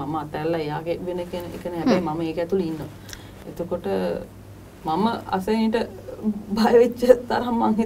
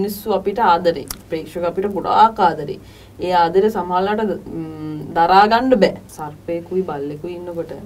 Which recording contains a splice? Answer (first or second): second